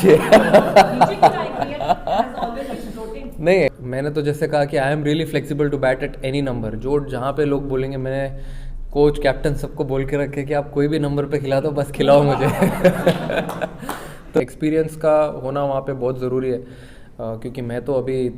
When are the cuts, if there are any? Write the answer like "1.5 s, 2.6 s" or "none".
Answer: 3.8 s, 14.4 s